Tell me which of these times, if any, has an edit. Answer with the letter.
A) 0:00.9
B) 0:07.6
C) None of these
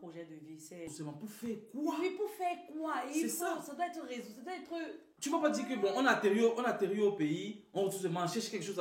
A